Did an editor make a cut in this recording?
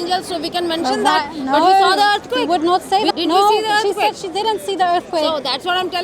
yes; 1 cut; at 3.1 s

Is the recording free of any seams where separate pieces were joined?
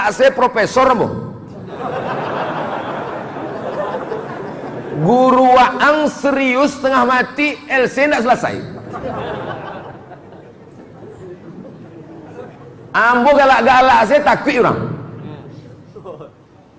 yes; 0 cuts

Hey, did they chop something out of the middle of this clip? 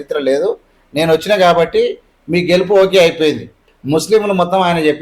yes; 1 cut; at 3.6 s

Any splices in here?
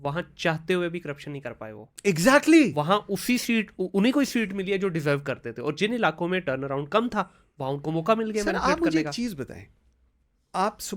no; 0 cuts

